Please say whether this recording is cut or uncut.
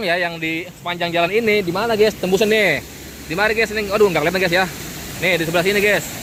uncut